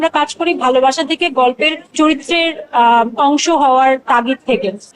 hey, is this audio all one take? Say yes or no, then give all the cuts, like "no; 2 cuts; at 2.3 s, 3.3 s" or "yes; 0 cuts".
yes; 0 cuts